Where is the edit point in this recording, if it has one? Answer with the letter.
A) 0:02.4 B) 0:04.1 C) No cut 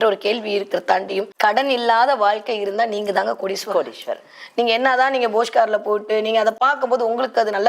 C